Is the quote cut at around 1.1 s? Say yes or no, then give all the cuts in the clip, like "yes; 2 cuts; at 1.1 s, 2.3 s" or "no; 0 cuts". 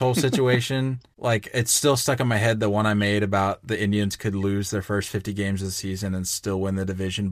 yes; 1 cut; at 1.1 s